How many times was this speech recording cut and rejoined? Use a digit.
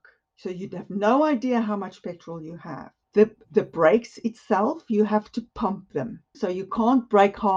1